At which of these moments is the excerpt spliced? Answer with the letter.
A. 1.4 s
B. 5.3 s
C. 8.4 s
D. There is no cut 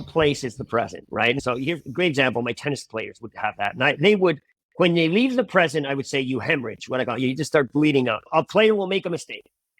A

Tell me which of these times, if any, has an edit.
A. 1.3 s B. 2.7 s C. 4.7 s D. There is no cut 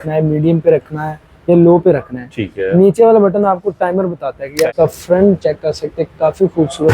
C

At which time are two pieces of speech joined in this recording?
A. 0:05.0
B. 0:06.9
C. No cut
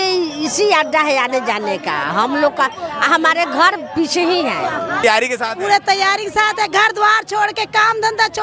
A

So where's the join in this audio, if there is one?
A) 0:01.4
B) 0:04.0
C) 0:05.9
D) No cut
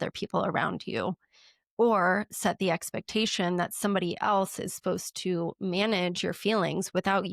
D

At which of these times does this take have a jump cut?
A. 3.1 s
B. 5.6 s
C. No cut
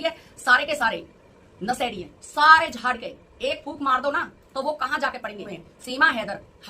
B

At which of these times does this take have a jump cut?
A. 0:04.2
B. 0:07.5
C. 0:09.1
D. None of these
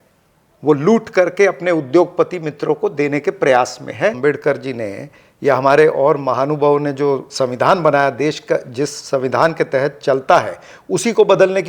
A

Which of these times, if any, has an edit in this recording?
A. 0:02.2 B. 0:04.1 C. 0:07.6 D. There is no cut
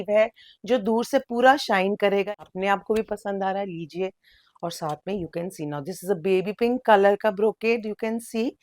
A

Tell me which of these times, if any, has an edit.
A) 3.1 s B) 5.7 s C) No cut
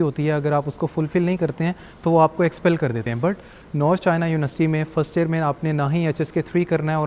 A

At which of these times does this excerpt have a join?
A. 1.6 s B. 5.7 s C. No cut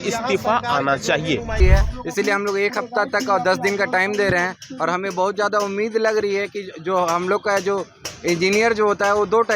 A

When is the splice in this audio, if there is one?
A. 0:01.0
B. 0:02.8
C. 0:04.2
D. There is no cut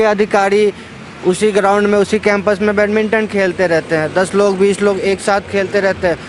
D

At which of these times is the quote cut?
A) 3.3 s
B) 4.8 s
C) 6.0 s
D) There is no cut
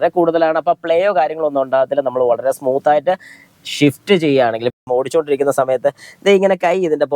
B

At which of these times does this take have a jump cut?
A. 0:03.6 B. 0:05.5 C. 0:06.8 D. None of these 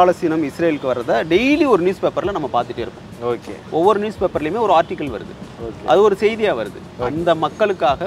C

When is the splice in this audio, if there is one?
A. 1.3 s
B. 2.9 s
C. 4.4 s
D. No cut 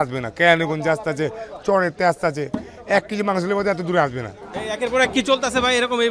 C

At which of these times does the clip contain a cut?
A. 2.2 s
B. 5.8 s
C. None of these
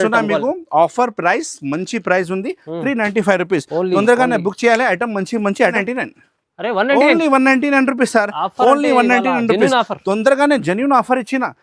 B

